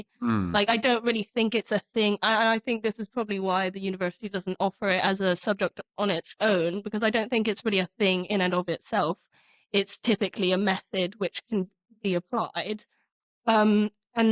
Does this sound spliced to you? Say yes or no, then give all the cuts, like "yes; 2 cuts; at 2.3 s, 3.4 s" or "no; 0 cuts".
no; 0 cuts